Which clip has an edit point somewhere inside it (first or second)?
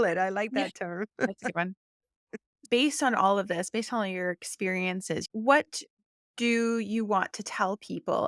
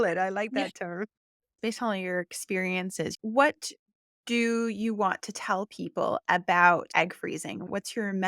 second